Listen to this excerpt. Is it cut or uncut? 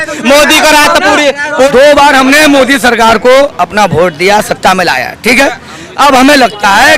cut